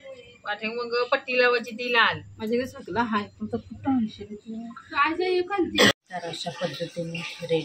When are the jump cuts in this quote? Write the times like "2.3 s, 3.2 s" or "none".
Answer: 5.9 s